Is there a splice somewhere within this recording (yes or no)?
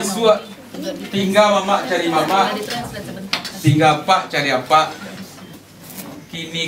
yes